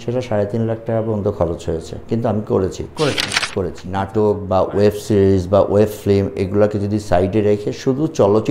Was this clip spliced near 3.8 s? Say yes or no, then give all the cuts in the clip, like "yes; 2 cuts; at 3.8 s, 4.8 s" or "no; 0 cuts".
yes; 1 cut; at 3.8 s